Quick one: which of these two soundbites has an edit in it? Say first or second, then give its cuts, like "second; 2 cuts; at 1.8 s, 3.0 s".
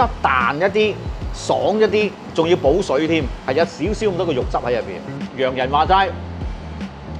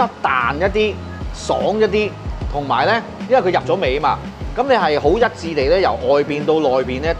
first; 2 cuts; at 2.2 s, 5.0 s